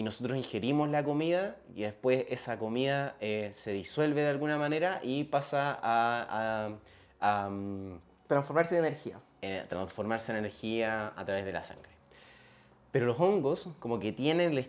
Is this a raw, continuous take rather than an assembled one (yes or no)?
yes